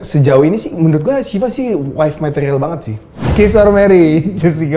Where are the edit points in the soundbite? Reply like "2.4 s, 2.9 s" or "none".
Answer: 3.2 s

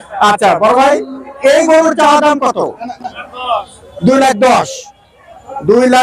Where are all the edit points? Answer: none

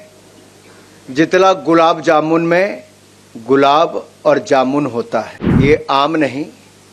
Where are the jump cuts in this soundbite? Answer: 5.4 s

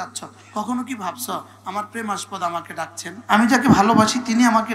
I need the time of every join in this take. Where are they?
3.1 s

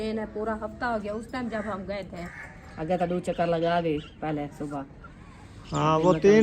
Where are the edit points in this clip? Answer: 2.2 s, 4.1 s

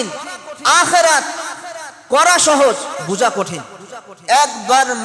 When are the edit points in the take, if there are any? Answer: 4.1 s

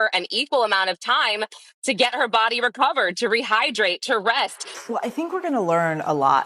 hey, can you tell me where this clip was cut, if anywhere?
5.1 s

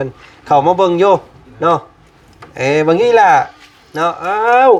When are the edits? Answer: none

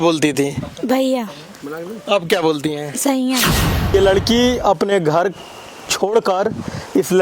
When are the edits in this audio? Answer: 3.9 s

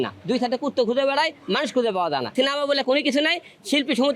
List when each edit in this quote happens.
2.3 s

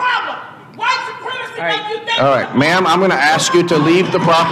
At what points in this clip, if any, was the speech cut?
none

